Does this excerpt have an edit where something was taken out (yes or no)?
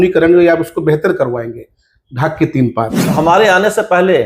yes